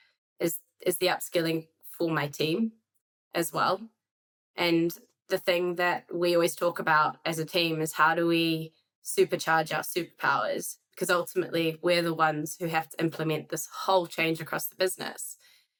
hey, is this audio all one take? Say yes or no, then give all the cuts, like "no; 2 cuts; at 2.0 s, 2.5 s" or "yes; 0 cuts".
yes; 0 cuts